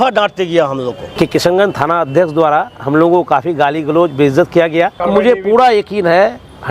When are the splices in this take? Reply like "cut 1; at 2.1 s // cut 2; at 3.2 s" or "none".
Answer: cut 1; at 1.0 s // cut 2; at 5.0 s

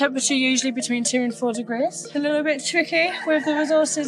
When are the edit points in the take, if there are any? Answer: cut 1; at 2.0 s

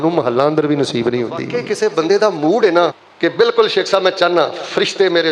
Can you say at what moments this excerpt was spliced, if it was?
cut 1; at 1.6 s

